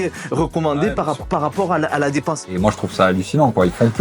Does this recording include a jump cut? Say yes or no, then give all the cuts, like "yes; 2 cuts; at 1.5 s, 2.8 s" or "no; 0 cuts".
yes; 1 cut; at 2.4 s